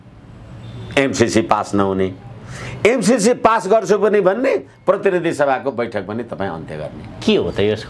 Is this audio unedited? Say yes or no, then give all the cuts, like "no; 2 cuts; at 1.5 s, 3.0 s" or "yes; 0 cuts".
yes; 0 cuts